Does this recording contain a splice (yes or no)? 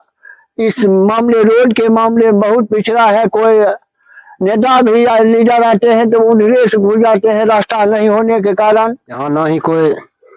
yes